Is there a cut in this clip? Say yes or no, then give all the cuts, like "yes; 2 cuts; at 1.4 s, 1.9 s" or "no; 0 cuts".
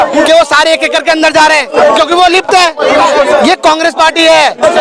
no; 0 cuts